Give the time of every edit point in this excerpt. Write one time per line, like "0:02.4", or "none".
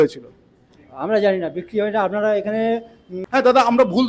0:03.2